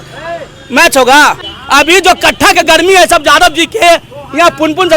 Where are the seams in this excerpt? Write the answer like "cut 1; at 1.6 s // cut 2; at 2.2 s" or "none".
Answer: cut 1; at 1.5 s